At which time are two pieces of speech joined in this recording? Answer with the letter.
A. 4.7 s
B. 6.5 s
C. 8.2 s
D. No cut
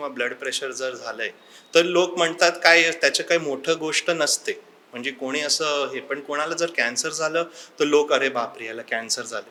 D